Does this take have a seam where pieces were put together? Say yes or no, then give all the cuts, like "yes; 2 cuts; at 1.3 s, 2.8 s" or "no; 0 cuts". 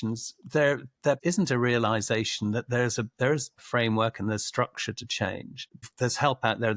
yes; 2 cuts; at 1.2 s, 5.8 s